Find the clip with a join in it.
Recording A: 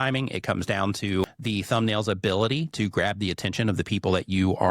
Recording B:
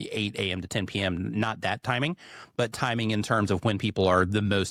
A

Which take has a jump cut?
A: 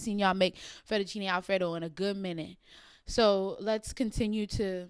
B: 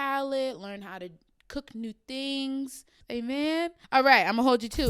B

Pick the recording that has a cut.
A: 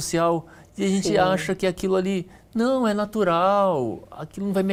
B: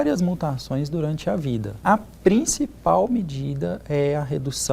B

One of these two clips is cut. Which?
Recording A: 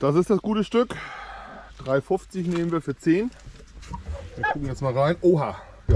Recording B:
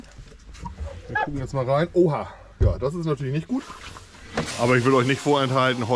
B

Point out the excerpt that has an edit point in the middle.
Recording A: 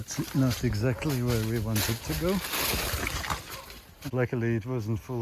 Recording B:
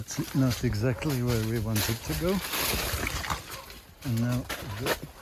A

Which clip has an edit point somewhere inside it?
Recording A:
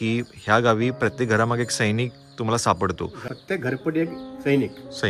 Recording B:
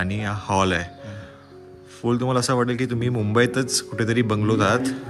A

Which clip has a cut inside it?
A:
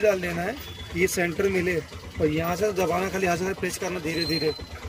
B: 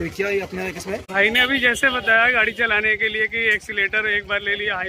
B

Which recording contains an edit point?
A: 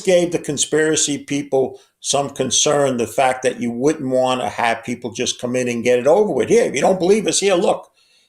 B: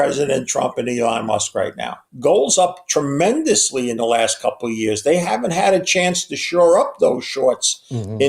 B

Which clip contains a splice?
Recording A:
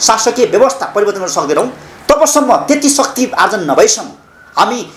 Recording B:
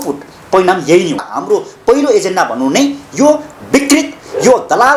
B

